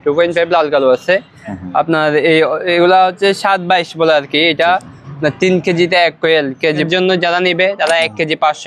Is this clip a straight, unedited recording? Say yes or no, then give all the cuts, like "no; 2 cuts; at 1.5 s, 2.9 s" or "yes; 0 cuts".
no; 1 cut; at 6.8 s